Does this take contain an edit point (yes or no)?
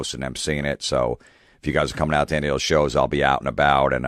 yes